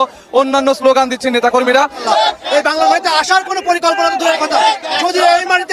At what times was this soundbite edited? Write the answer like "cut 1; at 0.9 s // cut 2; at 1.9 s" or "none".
cut 1; at 2.0 s